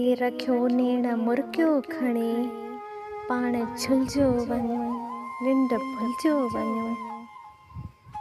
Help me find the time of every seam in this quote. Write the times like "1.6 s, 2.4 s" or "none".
none